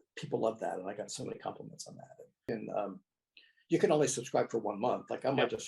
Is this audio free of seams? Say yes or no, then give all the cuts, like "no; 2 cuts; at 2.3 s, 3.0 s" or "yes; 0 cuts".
no; 1 cut; at 2.4 s